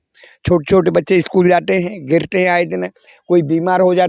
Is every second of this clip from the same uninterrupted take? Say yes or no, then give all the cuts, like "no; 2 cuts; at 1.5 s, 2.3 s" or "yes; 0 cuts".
yes; 0 cuts